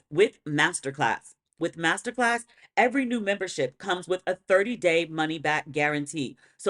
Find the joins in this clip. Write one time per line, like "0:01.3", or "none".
0:01.6